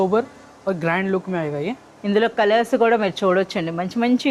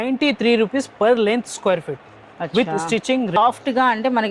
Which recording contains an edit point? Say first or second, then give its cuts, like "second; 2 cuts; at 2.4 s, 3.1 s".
second; 1 cut; at 3.4 s